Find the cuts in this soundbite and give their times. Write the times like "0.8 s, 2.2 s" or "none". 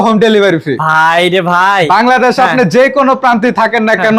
none